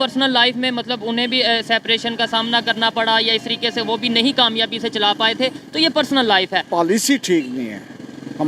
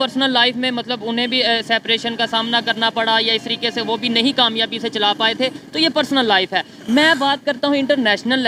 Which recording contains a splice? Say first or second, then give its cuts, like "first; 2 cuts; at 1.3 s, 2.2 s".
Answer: first; 1 cut; at 6.7 s